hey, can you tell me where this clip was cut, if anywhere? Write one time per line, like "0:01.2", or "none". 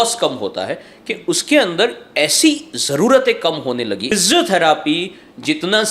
0:04.1